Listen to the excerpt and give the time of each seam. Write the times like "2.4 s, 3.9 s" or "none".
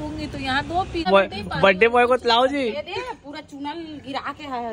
1.1 s